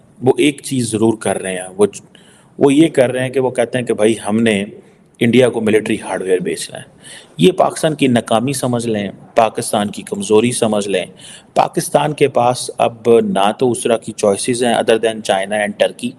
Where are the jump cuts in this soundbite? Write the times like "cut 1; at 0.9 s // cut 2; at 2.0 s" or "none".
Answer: none

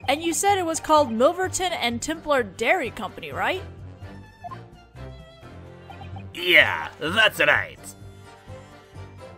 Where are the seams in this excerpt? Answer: none

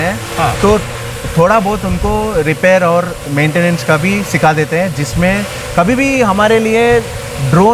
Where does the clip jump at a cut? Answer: none

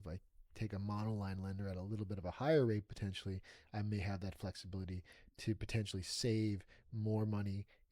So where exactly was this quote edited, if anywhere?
none

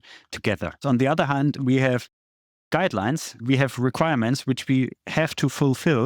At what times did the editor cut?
cut 1; at 0.8 s // cut 2; at 3.4 s

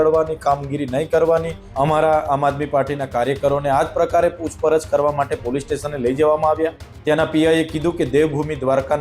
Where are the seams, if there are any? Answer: cut 1; at 1.6 s // cut 2; at 6.9 s

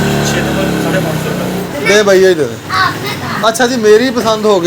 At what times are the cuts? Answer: cut 1; at 1.6 s

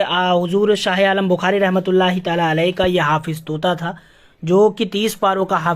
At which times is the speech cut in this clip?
none

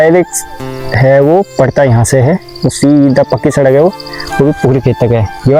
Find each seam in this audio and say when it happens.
none

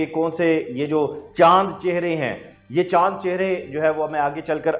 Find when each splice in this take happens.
none

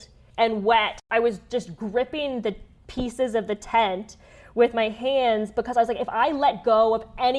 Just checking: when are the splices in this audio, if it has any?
cut 1; at 0.9 s

